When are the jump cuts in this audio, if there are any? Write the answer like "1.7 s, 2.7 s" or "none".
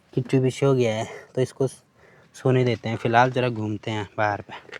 none

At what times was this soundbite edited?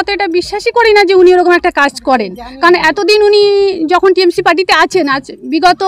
none

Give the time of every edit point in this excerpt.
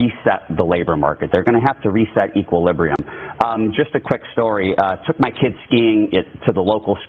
1.6 s, 4.7 s

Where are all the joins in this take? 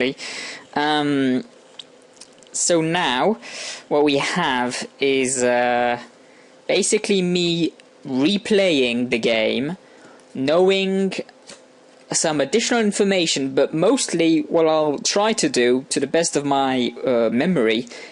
none

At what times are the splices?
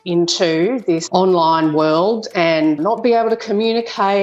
1.0 s, 2.8 s

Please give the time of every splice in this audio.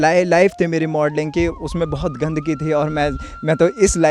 none

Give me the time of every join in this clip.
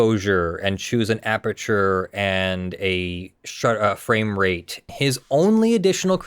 4.8 s

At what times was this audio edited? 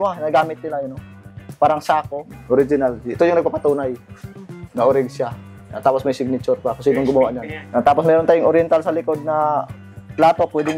2.3 s, 7.5 s

